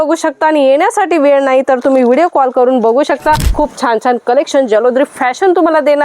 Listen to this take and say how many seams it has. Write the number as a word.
one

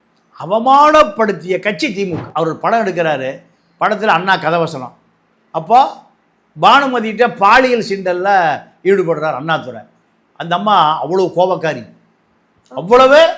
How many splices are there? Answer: one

